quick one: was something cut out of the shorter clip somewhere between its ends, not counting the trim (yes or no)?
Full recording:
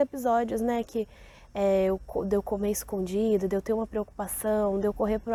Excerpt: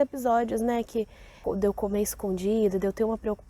yes